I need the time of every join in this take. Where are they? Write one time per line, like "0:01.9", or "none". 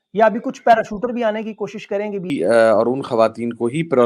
0:02.3